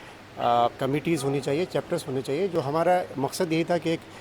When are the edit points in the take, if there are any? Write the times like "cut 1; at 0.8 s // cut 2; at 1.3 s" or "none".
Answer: cut 1; at 2.5 s